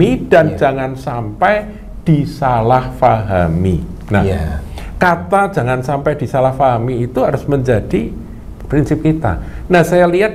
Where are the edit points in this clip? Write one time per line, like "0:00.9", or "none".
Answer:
0:08.5

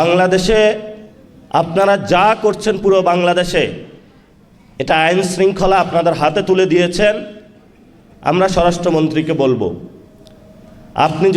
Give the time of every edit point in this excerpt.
none

